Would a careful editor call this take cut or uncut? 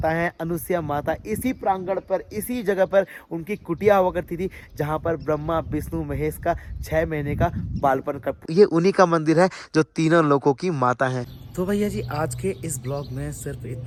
uncut